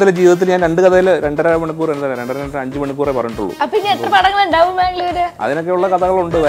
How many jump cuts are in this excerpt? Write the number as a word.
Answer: one